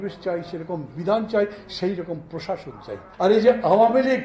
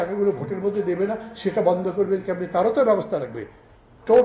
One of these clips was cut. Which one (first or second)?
first